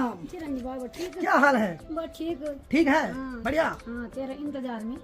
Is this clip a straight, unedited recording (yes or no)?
yes